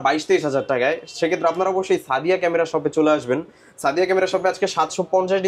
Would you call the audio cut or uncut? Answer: uncut